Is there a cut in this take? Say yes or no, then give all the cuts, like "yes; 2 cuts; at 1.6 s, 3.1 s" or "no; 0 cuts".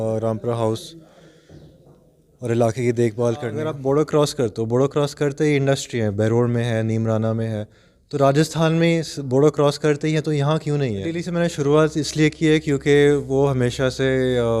yes; 2 cuts; at 3.7 s, 11.3 s